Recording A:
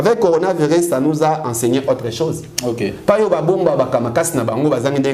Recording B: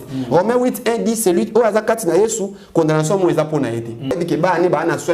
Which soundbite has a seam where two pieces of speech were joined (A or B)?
B